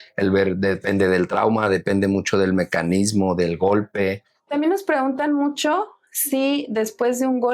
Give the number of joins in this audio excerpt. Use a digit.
1